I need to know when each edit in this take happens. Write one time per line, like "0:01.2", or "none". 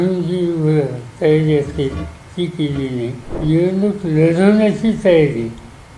0:03.3

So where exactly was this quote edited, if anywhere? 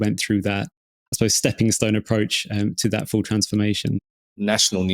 0:04.0

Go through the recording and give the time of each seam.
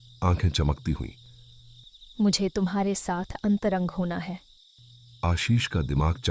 none

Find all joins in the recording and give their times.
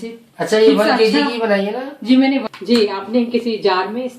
0:02.5

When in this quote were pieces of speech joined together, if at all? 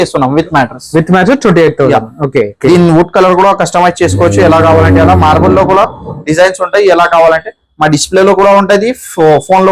0:02.5

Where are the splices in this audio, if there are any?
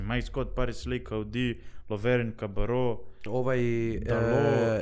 none

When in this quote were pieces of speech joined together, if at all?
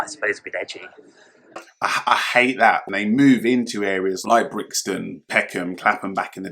0:02.9

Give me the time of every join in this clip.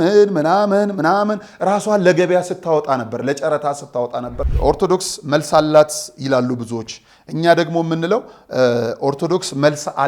0:04.4

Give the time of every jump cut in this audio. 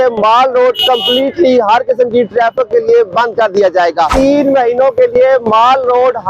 0:04.1

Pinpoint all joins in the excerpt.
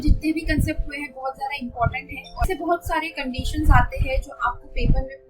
0:02.4

